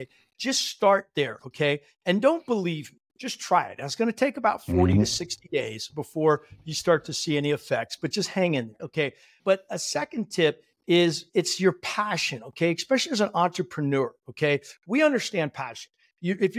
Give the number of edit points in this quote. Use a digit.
0